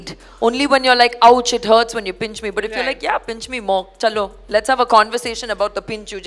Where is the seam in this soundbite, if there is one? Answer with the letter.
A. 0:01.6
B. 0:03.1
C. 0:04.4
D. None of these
D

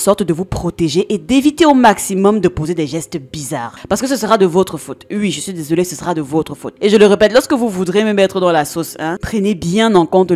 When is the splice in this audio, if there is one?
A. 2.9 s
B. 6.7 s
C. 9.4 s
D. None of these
B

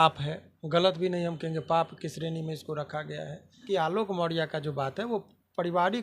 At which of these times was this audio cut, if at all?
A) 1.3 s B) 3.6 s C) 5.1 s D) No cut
B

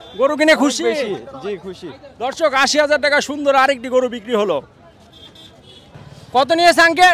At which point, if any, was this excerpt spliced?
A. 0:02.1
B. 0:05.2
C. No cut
C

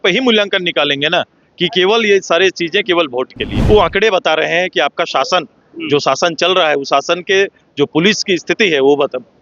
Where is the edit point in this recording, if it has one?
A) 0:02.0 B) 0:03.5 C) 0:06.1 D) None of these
B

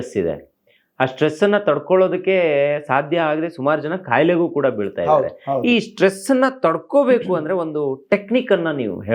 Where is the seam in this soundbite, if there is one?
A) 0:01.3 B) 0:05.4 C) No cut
C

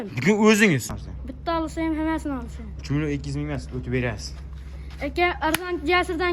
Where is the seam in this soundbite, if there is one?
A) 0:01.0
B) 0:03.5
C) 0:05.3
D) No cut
A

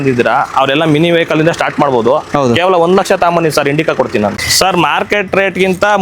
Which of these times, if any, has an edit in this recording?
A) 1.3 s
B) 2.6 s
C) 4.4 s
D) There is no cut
C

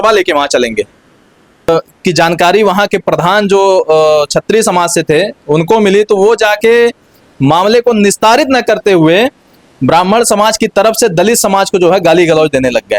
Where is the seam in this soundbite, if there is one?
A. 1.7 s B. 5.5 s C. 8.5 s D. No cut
A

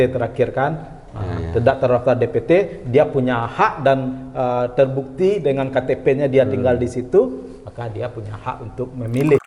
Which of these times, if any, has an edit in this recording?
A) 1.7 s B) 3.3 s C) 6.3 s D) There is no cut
D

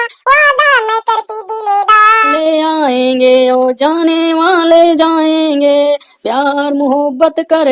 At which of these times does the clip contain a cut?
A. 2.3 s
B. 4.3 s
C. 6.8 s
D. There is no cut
A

